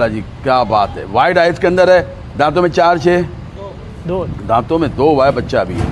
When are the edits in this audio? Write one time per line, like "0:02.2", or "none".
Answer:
none